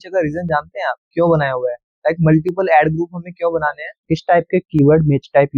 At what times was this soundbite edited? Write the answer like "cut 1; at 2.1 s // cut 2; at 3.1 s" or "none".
cut 1; at 4.0 s